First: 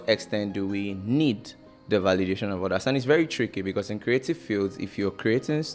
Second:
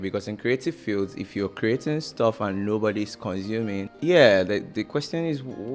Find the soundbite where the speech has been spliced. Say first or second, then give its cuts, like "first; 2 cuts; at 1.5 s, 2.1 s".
second; 1 cut; at 3.9 s